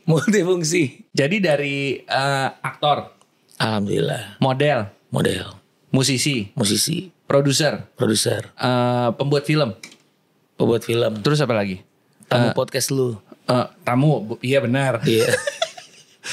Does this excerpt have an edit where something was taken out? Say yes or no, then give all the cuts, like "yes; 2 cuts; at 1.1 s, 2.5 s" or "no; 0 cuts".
no; 0 cuts